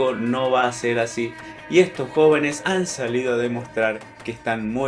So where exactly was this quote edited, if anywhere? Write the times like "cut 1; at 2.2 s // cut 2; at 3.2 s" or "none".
cut 1; at 2.6 s